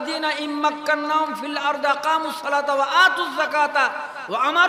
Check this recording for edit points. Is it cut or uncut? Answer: uncut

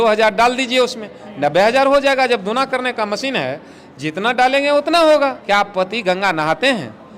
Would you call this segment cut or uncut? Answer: cut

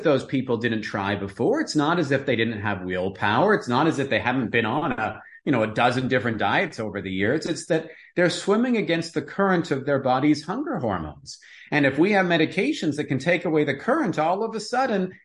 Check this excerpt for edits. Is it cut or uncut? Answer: uncut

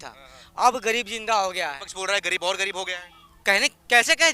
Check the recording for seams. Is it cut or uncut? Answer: uncut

